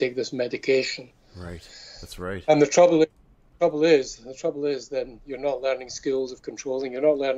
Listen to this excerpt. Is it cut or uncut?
uncut